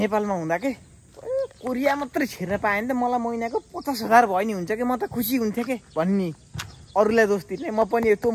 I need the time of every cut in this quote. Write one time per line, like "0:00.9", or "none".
none